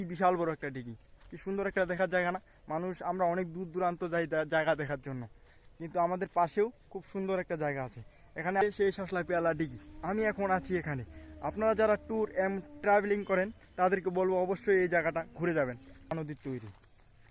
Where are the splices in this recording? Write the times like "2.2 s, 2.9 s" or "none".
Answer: 8.6 s, 16.1 s